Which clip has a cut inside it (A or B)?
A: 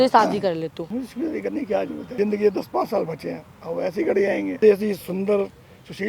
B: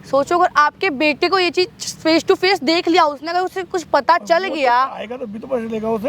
A